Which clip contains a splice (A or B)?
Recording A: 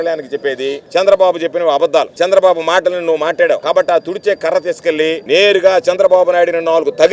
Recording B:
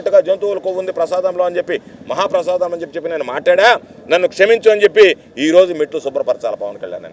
A